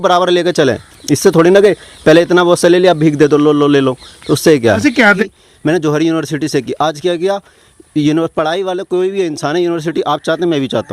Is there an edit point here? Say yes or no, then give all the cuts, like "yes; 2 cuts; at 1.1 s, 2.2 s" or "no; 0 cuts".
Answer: yes; 1 cut; at 5.2 s